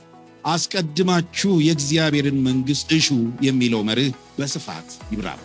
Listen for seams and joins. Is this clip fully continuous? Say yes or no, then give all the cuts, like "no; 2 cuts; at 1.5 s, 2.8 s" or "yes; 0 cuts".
no; 1 cut; at 4.5 s